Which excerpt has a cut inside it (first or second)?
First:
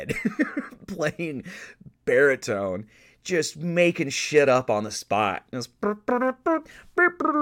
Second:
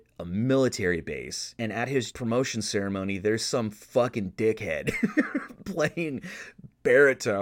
second